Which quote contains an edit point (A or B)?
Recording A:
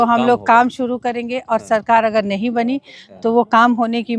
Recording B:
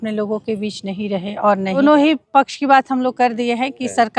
B